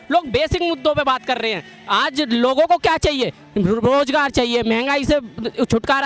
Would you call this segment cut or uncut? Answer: uncut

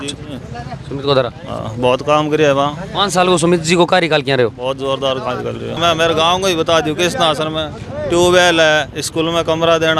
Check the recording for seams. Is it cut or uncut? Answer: cut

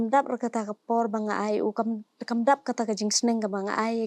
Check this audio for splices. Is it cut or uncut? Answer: uncut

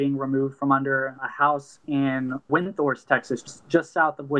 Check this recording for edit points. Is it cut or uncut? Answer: cut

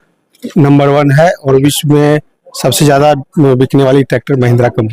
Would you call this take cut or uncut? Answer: uncut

